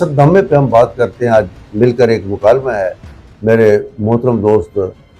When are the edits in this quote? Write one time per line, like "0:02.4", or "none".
none